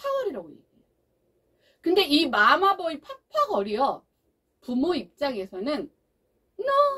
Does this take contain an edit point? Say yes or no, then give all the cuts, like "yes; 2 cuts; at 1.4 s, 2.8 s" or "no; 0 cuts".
no; 0 cuts